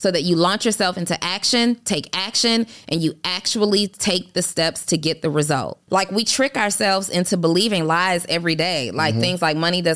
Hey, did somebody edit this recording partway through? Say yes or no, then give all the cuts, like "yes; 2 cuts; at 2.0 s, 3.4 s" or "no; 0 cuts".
yes; 1 cut; at 5.8 s